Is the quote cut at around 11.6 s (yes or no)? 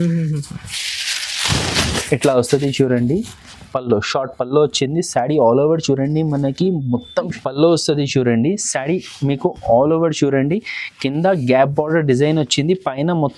no